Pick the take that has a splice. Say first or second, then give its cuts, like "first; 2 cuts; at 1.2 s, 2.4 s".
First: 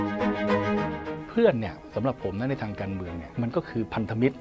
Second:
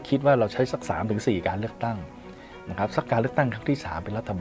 first; 2 cuts; at 1.1 s, 3.2 s